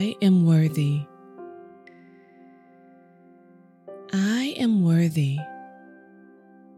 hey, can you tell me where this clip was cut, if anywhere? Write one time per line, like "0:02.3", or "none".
0:01.3
0:04.1
0:05.4